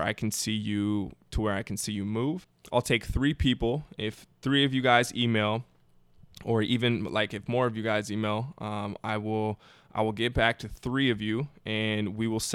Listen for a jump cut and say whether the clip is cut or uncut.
cut